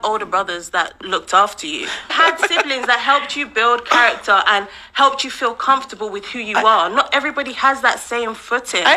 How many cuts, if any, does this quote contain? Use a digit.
1